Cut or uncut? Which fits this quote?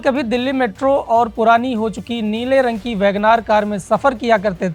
uncut